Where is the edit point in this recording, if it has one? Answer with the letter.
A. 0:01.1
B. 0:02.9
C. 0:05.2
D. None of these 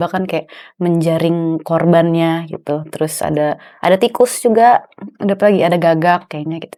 D